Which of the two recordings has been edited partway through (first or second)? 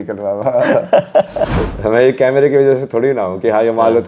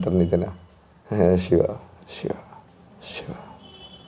first